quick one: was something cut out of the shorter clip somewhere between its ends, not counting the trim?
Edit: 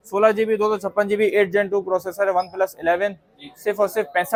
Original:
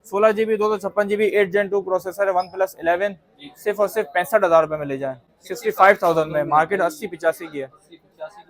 no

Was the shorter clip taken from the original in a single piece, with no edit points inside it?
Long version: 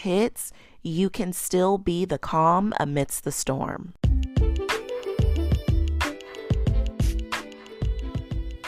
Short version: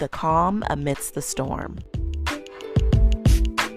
no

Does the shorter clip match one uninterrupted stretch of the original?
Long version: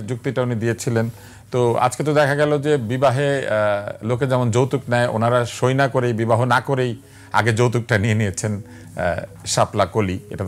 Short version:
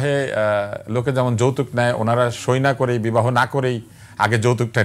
yes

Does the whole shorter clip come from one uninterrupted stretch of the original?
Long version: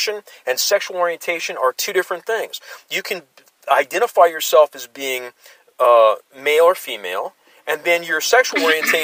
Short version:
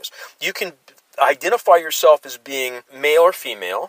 no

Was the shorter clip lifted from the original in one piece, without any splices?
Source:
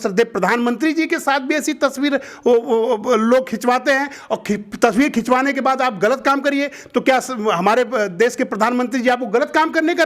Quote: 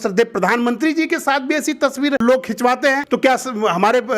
no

